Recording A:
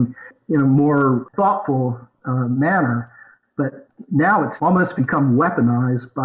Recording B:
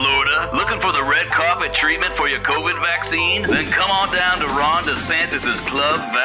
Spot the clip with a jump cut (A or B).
A